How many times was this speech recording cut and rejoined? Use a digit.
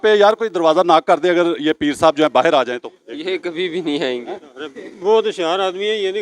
0